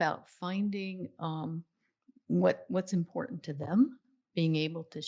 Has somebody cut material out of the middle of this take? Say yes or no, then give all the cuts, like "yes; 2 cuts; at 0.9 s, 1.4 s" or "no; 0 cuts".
no; 0 cuts